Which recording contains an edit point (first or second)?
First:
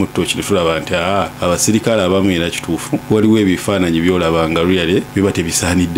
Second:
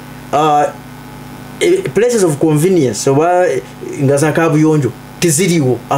first